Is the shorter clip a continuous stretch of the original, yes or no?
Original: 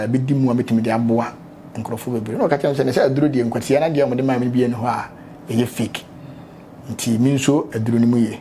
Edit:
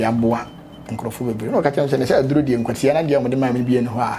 yes